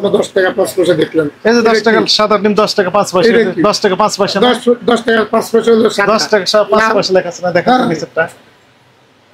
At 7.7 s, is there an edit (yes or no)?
no